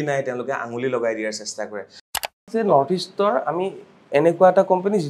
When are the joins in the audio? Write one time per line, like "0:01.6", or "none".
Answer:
0:02.3